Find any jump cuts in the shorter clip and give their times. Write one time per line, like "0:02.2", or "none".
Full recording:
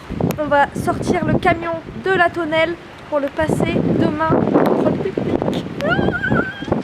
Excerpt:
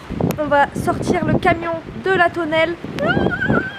0:02.9